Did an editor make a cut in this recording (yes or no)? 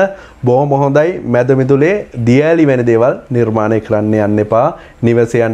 no